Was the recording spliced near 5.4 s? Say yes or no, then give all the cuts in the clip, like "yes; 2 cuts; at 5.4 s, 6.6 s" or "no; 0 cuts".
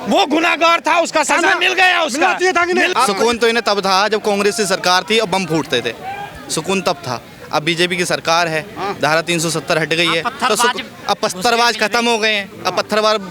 no; 1 cut; at 2.9 s